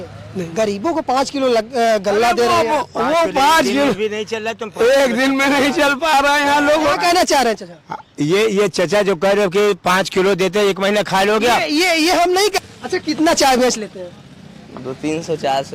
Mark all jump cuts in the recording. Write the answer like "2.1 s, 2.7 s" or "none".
12.5 s